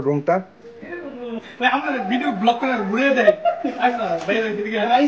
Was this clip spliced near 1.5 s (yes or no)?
yes